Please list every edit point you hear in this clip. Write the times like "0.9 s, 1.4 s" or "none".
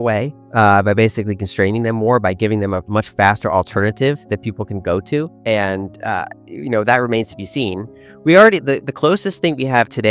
5.3 s